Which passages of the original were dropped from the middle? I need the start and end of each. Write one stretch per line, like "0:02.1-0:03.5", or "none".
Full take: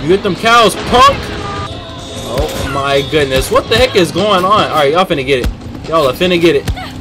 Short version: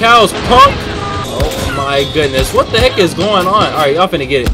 0:01.6-0:02.2